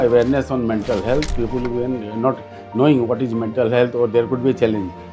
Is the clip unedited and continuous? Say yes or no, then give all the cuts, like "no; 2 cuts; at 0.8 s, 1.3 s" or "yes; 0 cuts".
yes; 0 cuts